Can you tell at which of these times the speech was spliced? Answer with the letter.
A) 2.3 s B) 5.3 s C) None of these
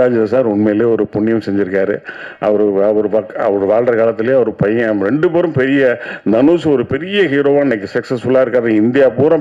C